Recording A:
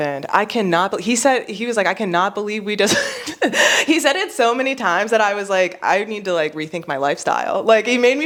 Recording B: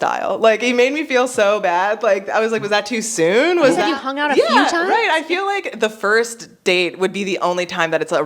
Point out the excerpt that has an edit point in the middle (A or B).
B